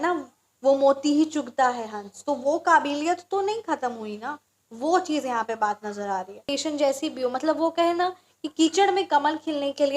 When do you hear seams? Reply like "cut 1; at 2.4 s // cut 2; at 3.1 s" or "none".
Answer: cut 1; at 6.5 s